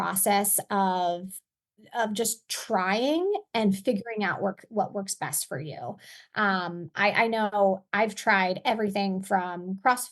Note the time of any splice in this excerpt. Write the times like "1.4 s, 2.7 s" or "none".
none